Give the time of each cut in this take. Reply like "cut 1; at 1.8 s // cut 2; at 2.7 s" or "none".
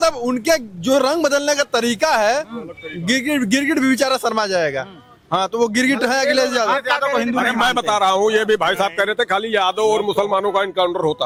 none